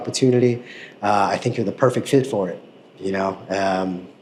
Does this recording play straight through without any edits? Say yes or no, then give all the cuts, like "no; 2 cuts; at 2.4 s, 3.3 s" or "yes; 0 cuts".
yes; 0 cuts